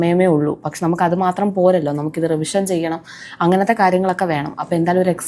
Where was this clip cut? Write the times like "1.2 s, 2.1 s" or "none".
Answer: none